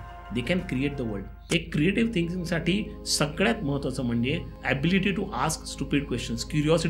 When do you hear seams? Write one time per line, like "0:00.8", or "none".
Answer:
0:01.3
0:04.5